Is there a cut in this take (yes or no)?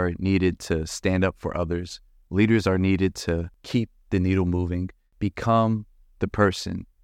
yes